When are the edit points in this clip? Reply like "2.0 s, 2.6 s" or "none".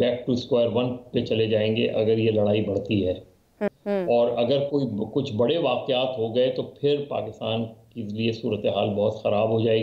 3.7 s